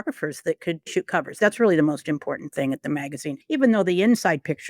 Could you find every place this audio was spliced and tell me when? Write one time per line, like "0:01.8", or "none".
0:00.9
0:03.3